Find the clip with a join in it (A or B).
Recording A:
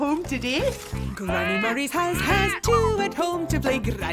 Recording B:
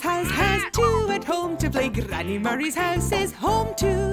A